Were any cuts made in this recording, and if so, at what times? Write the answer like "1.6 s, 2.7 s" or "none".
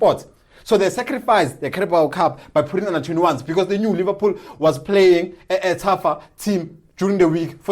none